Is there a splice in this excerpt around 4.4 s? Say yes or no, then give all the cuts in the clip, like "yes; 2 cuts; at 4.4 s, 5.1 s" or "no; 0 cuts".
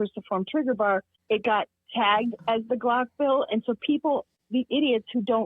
yes; 2 cuts; at 1.1 s, 4.4 s